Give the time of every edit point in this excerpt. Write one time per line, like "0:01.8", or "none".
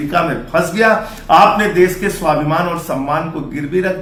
none